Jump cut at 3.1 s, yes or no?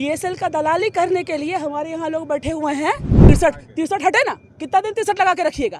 yes